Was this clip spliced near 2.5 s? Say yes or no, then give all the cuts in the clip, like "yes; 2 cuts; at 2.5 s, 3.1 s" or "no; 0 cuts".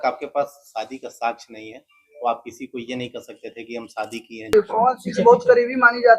no; 1 cut; at 4.5 s